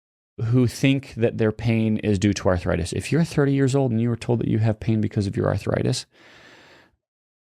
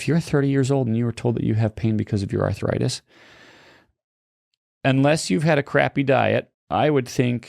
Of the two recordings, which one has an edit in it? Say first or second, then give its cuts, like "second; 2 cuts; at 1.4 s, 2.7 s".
second; 1 cut; at 6.6 s